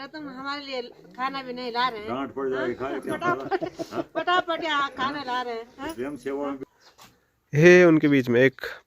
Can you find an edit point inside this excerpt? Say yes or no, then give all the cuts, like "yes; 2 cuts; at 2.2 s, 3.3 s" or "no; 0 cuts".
yes; 1 cut; at 6.6 s